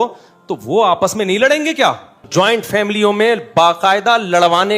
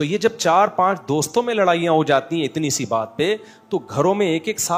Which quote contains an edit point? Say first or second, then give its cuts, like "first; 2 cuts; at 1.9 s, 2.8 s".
first; 1 cut; at 2.1 s